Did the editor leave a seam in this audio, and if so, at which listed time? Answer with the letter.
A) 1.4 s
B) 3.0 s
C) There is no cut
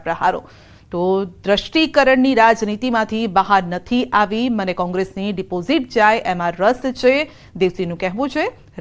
C